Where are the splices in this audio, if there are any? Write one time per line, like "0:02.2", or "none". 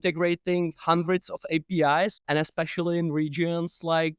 0:02.2